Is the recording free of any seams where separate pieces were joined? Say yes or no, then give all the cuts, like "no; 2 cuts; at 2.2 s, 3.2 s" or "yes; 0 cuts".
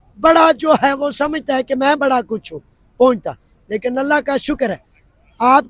yes; 0 cuts